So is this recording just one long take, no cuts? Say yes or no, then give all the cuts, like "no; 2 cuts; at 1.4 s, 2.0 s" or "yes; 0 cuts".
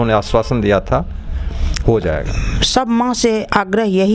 no; 1 cut; at 2.4 s